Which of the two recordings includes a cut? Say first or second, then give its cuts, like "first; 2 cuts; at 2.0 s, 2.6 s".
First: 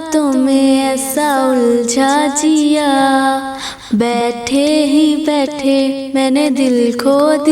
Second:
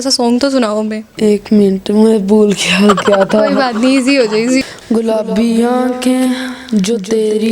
second; 2 cuts; at 1.0 s, 4.6 s